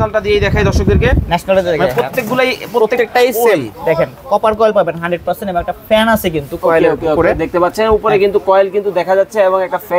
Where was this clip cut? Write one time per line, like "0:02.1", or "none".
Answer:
none